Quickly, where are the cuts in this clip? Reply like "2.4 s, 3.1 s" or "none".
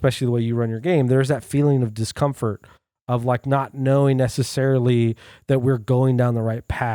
none